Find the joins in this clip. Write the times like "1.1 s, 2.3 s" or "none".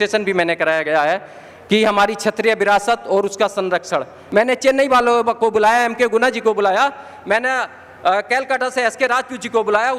4.2 s